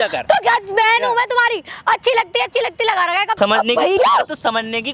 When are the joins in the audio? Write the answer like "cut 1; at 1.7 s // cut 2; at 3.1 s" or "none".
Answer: cut 1; at 3.3 s